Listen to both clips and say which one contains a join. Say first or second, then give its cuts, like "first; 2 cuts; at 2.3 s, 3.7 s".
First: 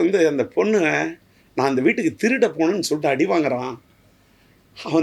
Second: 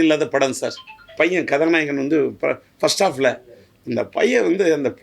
second; 1 cut; at 1.1 s